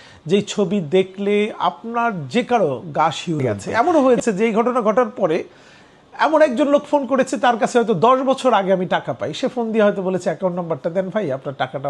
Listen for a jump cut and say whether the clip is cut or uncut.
cut